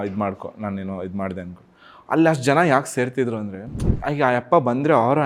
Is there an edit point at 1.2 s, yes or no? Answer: no